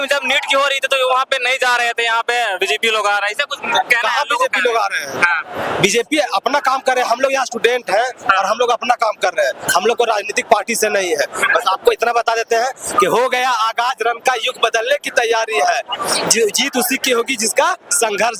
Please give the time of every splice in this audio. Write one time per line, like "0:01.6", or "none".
none